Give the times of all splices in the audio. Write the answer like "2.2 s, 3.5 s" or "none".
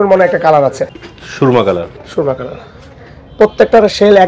1.0 s